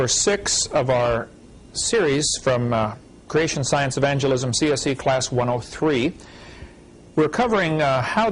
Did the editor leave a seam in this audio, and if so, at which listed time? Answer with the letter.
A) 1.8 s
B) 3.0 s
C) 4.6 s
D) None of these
D